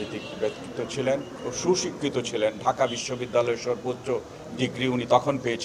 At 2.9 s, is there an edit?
no; 1 cut; at 1.4 s

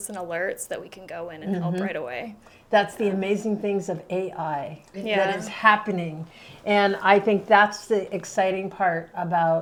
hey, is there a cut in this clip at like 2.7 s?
no; 0 cuts

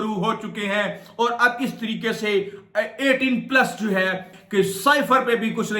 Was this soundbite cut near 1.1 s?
no; 1 cut; at 4.3 s

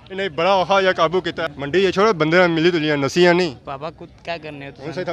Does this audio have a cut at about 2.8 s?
no; 1 cut; at 1.3 s

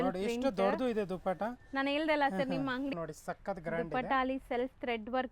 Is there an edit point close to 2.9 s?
yes; 1 cut; at 2.9 s

